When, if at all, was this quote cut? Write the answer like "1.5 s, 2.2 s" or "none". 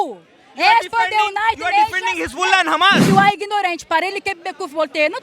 3.0 s